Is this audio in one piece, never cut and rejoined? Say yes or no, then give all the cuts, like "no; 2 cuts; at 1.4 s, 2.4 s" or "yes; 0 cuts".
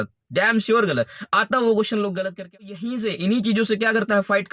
no; 1 cut; at 2.8 s